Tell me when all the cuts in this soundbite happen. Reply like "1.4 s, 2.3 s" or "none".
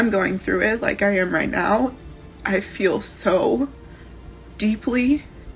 none